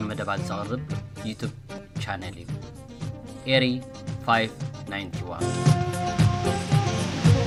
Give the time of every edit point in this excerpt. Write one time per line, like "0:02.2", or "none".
none